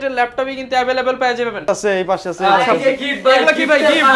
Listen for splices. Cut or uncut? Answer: cut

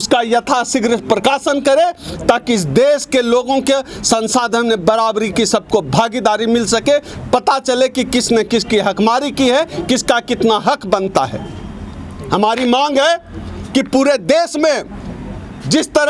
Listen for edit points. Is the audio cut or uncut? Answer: uncut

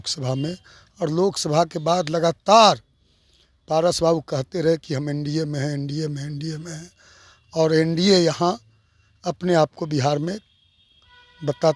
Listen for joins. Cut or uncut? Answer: uncut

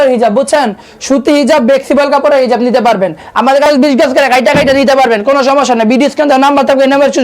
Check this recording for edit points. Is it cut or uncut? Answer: cut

